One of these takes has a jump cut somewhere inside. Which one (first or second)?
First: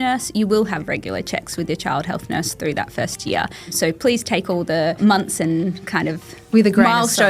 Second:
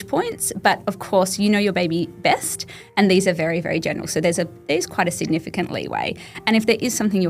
first